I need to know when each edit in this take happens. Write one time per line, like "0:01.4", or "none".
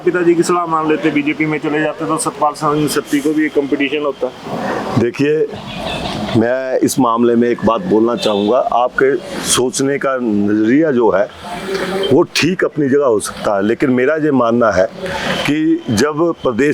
none